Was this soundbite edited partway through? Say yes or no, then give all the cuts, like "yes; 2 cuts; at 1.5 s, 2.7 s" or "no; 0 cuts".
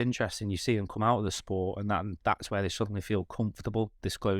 no; 0 cuts